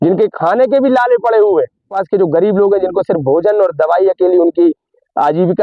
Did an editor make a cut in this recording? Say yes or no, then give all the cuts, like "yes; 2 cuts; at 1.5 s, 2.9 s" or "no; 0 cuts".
yes; 1 cut; at 1.9 s